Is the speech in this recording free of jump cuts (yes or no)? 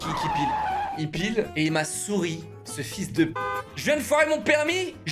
no